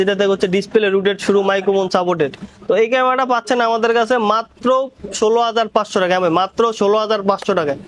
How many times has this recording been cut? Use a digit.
0